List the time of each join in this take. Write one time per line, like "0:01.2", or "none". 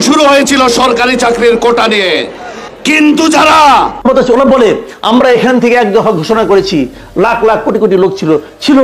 0:04.0